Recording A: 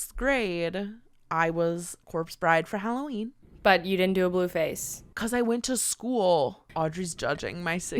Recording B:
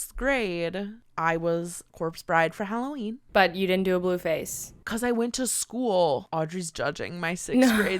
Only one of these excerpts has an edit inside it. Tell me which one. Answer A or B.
B